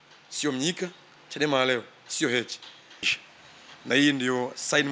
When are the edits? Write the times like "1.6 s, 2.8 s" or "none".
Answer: 3.1 s